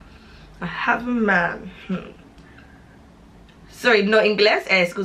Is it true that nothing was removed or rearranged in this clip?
yes; 0 cuts

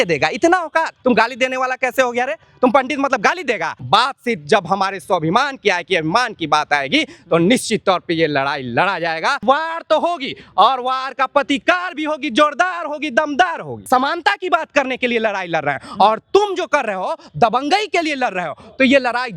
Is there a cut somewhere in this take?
yes; 4 cuts; at 0.9 s, 3.7 s, 9.4 s, 13.7 s

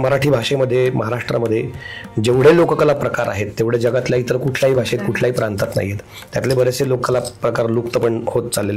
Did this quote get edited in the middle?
no; 0 cuts

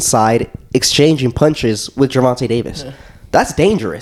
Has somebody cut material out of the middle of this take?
no; 0 cuts

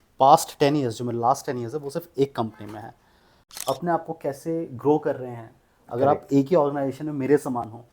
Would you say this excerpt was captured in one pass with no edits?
no; 1 cut; at 3.4 s

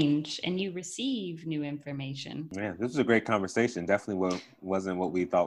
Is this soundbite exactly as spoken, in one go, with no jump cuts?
no; 1 cut; at 2.5 s

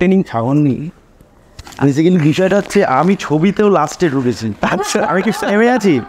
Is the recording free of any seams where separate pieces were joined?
yes; 0 cuts

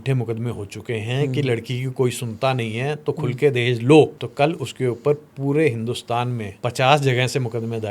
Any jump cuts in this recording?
yes; 2 cuts; at 4.2 s, 6.5 s

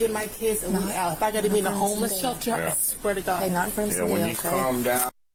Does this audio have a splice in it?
no; 0 cuts

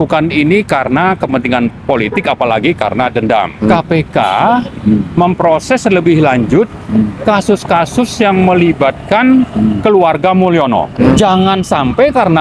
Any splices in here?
yes; 2 cuts; at 3.7 s, 11.1 s

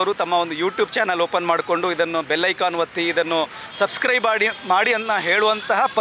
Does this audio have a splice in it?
no; 0 cuts

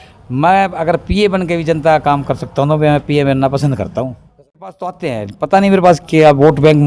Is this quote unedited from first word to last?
no; 1 cut; at 4.8 s

